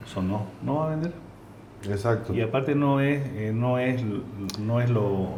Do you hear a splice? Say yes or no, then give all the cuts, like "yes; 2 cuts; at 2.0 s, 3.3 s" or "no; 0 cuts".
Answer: no; 0 cuts